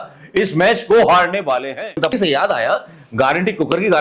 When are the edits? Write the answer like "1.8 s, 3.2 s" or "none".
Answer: 2.1 s